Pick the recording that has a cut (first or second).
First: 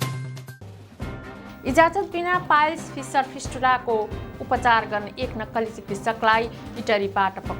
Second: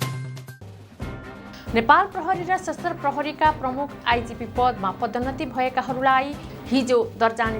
first